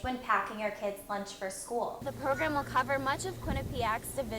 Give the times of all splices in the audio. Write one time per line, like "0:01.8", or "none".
0:02.0